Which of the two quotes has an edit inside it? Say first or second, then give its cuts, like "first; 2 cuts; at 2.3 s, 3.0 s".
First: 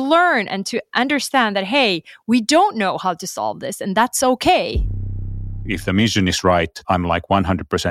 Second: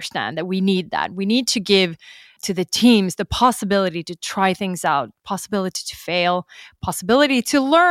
first; 2 cuts; at 5.0 s, 6.8 s